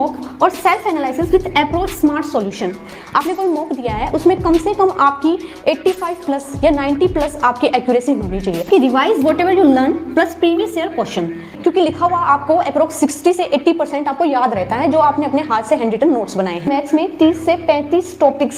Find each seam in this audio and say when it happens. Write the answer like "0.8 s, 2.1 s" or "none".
2.8 s, 8.7 s, 11.5 s, 16.7 s